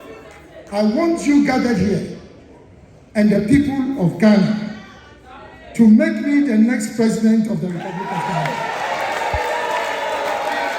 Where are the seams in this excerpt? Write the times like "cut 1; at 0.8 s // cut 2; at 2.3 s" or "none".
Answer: none